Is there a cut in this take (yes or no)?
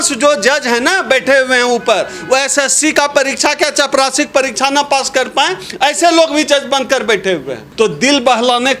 yes